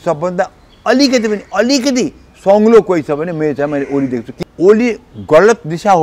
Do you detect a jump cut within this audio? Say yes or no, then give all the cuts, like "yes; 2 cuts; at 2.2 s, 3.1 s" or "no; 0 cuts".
yes; 1 cut; at 4.3 s